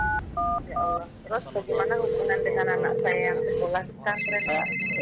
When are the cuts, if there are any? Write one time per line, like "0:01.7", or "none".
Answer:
none